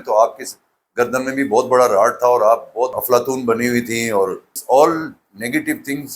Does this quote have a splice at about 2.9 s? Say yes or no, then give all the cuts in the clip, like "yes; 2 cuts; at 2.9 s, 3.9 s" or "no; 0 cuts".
yes; 2 cuts; at 2.9 s, 4.5 s